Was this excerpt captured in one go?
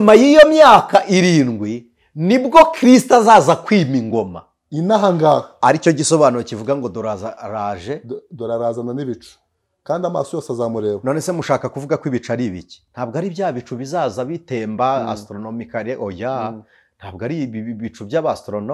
yes; 0 cuts

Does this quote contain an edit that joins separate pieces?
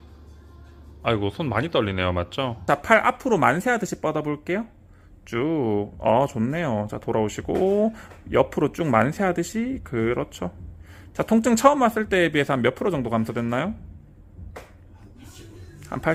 no; 0 cuts

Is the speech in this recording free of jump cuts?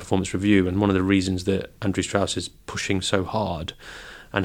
yes; 0 cuts

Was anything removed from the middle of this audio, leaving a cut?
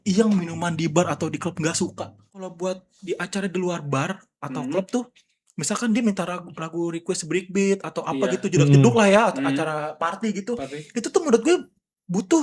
yes; 1 cut; at 2.4 s

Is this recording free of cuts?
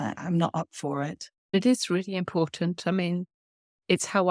no; 1 cut; at 1.3 s

